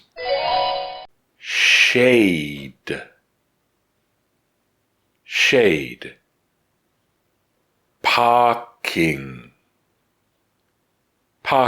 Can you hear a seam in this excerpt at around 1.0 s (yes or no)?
yes